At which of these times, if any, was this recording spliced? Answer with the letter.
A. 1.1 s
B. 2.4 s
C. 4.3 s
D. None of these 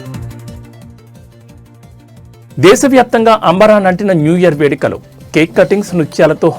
A